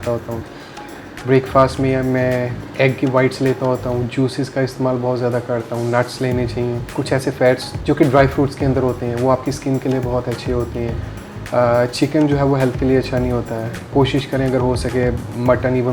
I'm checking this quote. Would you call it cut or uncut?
uncut